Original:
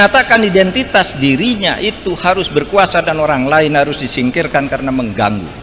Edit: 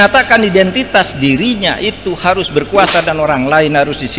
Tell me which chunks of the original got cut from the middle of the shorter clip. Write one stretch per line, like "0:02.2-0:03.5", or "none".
none